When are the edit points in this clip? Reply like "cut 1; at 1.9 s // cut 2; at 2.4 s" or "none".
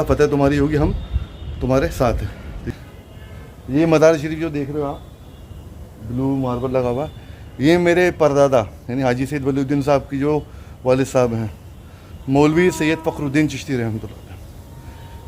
cut 1; at 2.6 s